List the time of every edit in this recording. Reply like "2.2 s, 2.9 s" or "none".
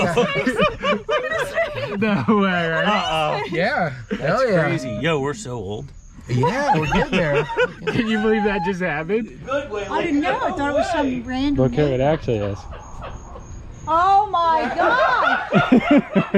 9.4 s